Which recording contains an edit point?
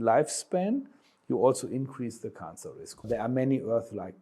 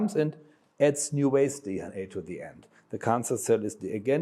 first; 1 cut; at 3.0 s

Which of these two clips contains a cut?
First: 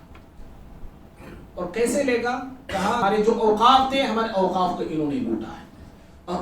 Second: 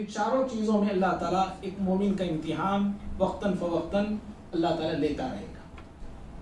first; 1 cut; at 3.0 s

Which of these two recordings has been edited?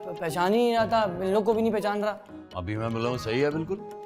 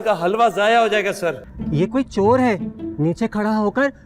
second; 1 cut; at 1.5 s

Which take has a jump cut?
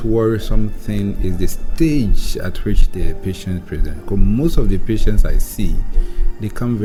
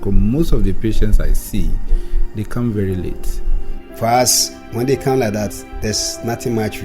second; 1 cut; at 3.8 s

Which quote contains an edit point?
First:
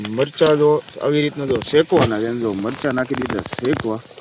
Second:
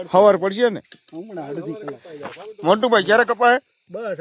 second; 1 cut; at 1.0 s

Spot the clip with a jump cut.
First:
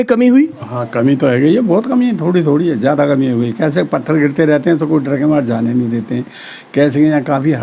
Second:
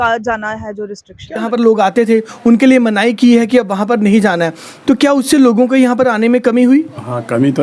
second; 1 cut; at 1.4 s

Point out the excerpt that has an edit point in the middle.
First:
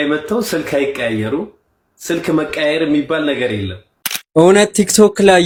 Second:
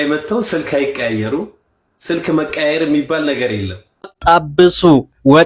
second; 1 cut; at 4.4 s

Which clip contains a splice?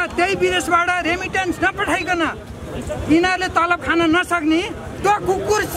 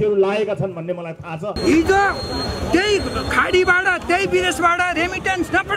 second; 1 cut; at 1.6 s

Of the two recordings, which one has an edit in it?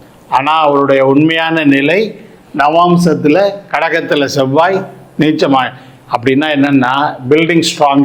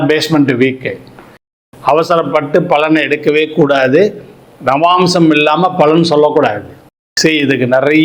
second; 2 cuts; at 1.5 s, 7.1 s

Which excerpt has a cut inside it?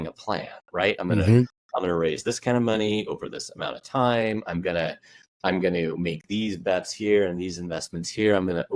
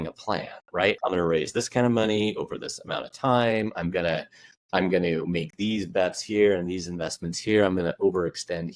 second; 1 cut; at 1.0 s

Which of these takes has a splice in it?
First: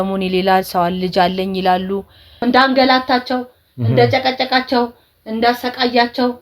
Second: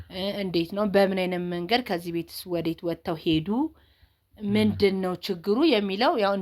first; 1 cut; at 2.4 s

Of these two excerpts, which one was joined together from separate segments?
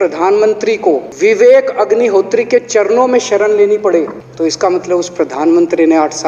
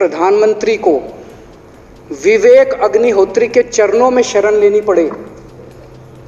first; 2 cuts; at 1.1 s, 4.2 s

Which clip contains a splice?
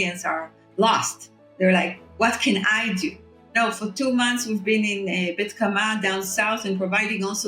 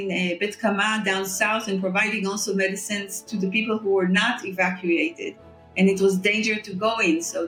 first; 1 cut; at 3.5 s

